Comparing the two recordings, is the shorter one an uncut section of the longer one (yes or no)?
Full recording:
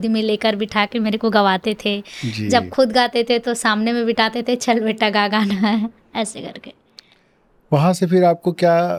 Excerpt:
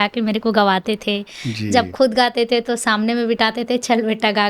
yes